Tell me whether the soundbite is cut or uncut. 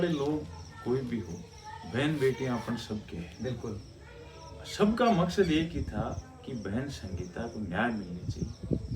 uncut